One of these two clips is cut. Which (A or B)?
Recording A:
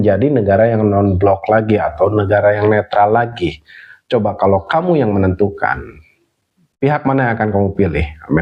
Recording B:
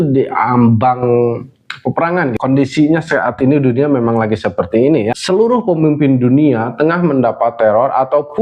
B